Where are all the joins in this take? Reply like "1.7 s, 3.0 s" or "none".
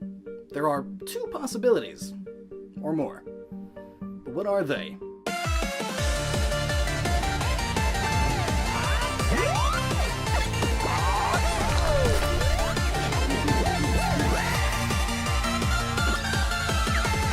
2.1 s